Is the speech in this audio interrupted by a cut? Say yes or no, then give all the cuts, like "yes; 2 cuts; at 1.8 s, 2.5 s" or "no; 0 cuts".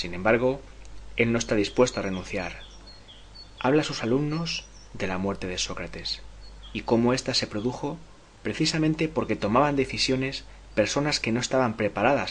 yes; 1 cut; at 3.2 s